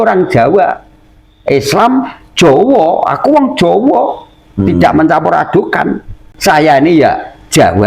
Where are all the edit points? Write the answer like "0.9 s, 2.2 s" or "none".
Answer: 6.2 s